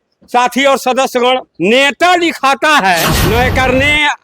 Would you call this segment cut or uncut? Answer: cut